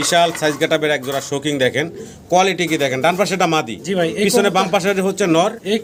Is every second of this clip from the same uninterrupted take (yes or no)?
yes